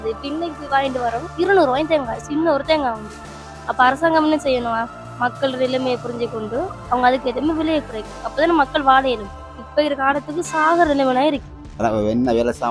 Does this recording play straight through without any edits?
yes; 0 cuts

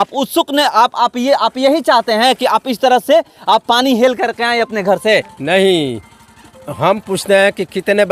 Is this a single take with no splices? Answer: yes; 0 cuts

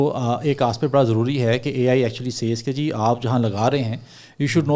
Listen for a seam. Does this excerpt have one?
no; 0 cuts

